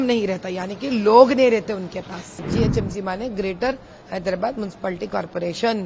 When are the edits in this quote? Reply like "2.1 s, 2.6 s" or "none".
2.5 s